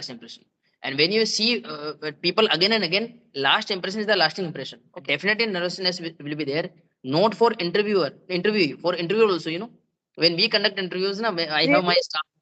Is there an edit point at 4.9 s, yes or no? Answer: yes